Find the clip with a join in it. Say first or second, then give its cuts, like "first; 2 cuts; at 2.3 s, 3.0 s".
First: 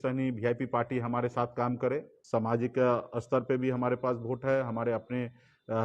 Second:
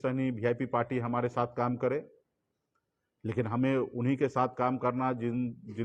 first; 1 cut; at 2.1 s